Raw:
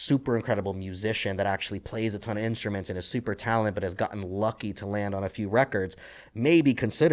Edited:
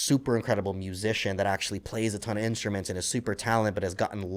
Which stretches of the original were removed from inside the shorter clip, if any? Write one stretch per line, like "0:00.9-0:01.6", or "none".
none

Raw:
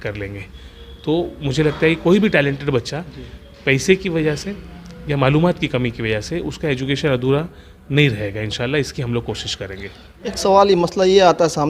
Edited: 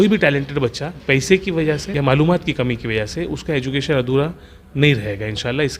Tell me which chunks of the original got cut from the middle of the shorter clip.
0:03.0-0:03.5
0:04.5-0:05.0

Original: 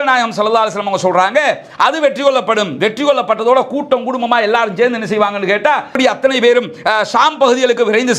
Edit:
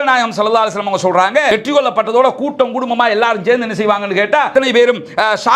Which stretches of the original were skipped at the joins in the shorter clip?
0:01.5-0:02.8
0:05.8-0:06.2

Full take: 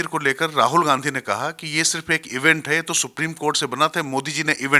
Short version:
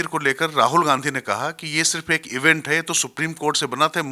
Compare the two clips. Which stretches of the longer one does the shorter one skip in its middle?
none

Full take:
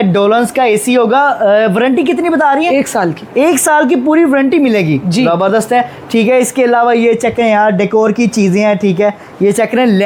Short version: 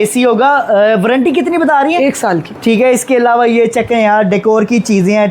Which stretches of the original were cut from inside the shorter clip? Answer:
0:03.2-0:06.0

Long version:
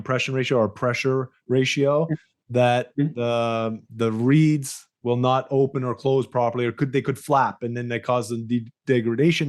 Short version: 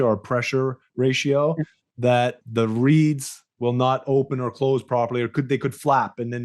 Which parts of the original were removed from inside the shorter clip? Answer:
0:02.9-0:03.8

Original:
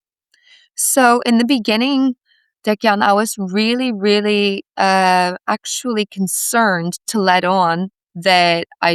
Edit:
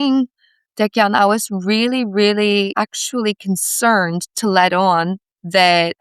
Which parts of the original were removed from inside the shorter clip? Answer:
0:04.6-0:05.4

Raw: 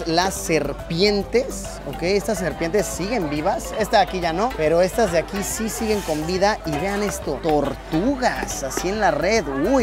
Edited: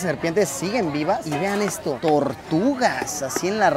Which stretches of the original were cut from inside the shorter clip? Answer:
0:03.6-0:06.7

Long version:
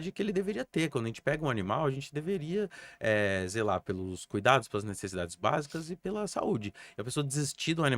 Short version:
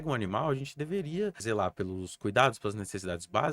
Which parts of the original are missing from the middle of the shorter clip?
0:02.8-0:03.5

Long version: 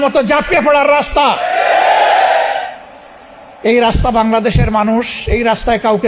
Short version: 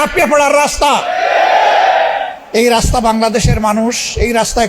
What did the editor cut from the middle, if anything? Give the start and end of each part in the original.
0:02.7-0:03.5

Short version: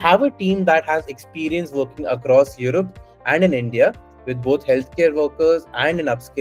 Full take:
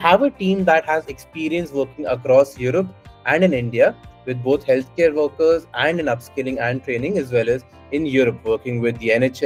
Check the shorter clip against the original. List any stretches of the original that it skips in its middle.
none

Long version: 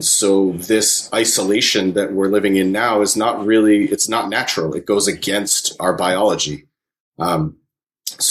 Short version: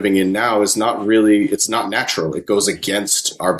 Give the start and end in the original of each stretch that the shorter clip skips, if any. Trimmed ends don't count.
none

